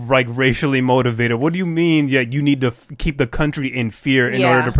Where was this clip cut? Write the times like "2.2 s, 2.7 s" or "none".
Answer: none